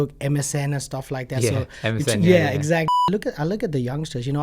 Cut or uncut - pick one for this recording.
cut